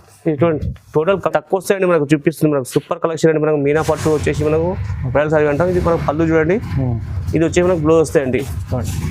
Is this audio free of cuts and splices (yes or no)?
no